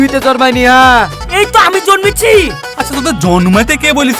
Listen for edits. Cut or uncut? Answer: cut